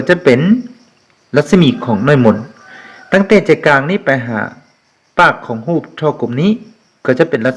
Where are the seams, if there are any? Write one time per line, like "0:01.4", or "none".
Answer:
none